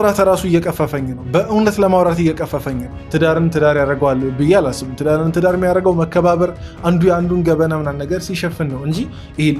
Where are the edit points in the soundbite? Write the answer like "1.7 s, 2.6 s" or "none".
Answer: 2.9 s

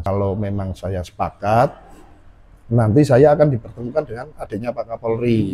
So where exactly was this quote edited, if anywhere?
none

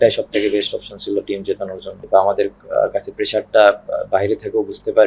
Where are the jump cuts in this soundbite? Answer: 2.0 s

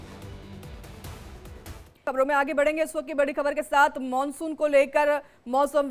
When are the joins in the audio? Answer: 1.9 s

